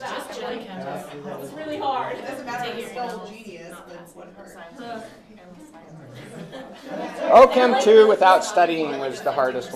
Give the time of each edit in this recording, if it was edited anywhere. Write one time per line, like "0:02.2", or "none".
none